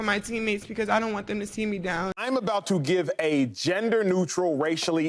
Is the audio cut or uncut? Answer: cut